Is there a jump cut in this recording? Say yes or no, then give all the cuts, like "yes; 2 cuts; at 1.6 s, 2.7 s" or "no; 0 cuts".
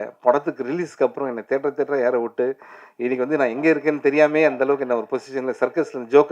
no; 0 cuts